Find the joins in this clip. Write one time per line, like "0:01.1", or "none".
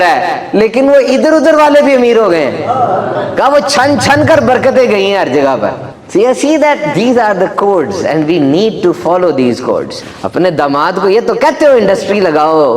none